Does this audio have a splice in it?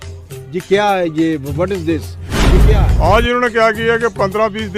yes; 1 cut; at 2.6 s

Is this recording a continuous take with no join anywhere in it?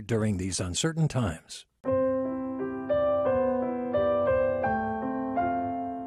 no; 1 cut; at 1.7 s

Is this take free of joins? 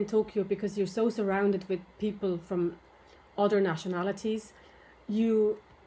yes; 0 cuts

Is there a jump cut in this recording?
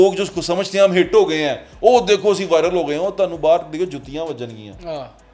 no; 0 cuts

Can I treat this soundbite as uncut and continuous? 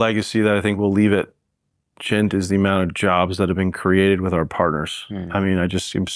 yes; 0 cuts

